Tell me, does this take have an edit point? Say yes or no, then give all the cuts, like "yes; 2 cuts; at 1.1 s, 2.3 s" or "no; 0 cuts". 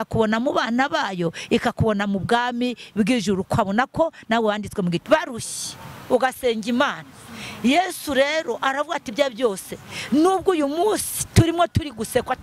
yes; 1 cut; at 5.0 s